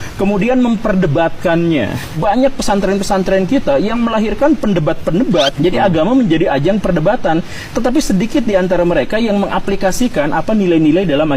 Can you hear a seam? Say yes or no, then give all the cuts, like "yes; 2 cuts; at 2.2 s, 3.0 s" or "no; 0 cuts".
no; 0 cuts